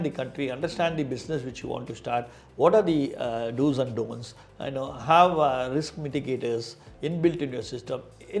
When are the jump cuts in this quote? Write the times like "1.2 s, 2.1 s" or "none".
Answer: none